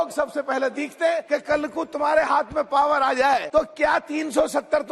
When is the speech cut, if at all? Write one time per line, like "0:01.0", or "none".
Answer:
0:01.2
0:03.5